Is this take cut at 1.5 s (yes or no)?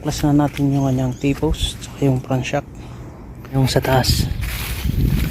no